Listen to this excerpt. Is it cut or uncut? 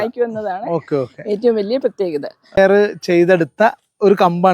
cut